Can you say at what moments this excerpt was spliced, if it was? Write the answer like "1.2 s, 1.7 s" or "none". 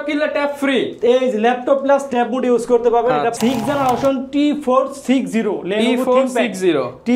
3.3 s